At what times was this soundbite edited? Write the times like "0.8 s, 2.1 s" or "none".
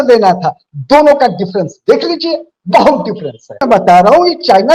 3.6 s